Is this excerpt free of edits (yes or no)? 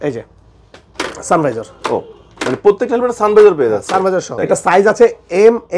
no